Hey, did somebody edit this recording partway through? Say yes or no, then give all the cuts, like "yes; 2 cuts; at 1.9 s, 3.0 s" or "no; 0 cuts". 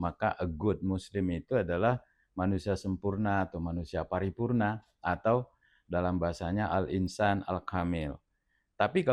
no; 0 cuts